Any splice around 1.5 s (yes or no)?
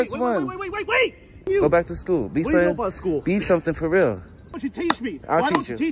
yes